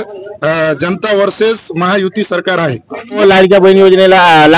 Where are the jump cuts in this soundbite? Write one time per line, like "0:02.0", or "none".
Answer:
0:03.2